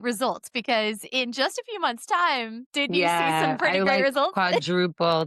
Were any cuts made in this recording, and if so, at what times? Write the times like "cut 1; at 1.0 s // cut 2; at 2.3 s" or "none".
cut 1; at 2.6 s